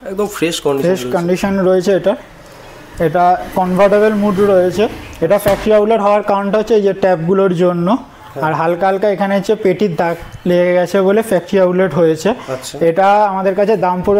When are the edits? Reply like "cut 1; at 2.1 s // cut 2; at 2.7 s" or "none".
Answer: none